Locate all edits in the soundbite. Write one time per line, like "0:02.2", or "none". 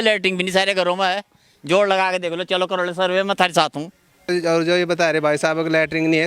0:04.3